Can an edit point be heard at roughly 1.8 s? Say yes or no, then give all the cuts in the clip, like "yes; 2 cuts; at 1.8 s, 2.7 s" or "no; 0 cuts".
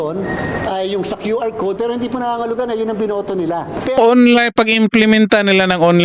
no; 1 cut; at 4.0 s